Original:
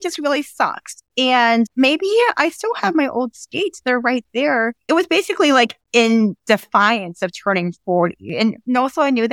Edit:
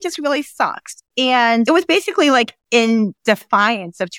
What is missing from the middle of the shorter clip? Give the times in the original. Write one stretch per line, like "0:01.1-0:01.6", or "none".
0:01.7-0:04.9